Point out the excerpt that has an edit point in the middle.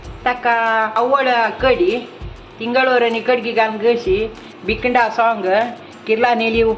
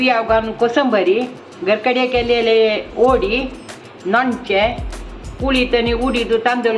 first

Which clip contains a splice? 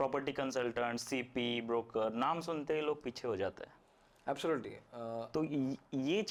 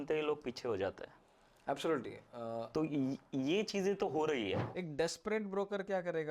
second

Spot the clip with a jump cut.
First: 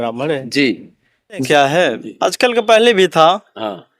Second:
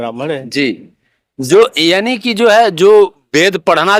first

